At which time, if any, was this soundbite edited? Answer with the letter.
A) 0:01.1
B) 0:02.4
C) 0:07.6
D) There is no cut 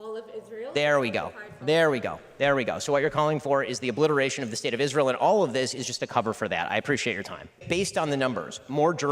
C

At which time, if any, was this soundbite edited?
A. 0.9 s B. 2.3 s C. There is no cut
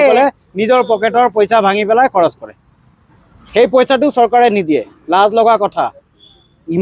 C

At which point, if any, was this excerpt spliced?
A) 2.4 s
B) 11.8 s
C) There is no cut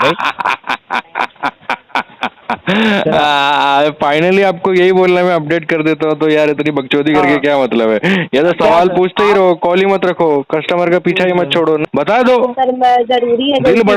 B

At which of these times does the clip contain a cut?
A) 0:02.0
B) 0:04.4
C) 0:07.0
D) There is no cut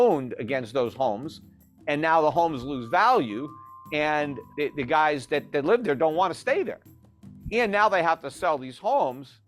B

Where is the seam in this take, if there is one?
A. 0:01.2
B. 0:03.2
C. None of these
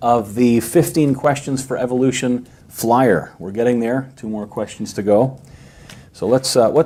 C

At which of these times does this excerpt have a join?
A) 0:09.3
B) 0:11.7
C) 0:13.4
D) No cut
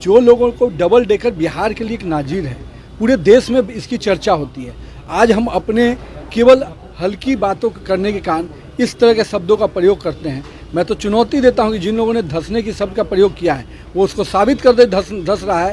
D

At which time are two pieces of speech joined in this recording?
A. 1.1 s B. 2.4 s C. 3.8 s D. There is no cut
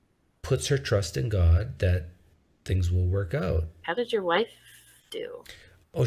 C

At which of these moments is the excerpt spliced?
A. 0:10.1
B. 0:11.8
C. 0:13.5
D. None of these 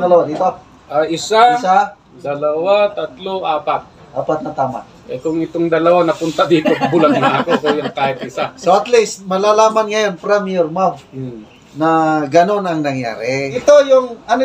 C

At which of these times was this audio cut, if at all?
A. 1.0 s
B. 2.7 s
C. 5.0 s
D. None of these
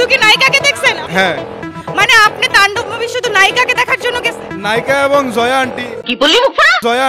A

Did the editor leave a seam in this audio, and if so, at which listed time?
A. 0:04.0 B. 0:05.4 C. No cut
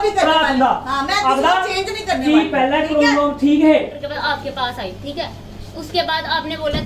A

